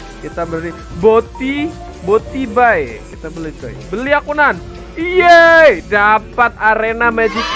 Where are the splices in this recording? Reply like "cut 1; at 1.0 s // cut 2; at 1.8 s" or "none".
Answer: none